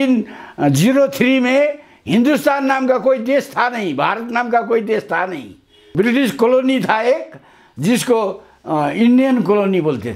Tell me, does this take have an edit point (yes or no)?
no